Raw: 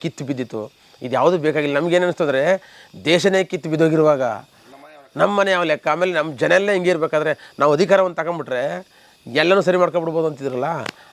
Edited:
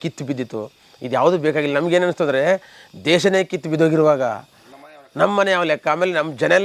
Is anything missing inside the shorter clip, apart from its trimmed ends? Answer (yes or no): no